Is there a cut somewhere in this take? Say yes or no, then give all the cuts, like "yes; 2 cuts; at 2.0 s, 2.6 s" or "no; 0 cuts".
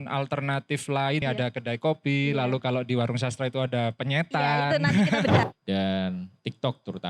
yes; 2 cuts; at 1.2 s, 5.4 s